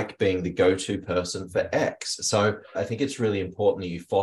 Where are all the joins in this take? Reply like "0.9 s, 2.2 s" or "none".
2.7 s